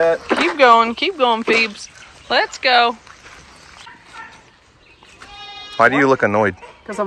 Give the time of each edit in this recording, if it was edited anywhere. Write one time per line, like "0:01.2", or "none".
0:03.8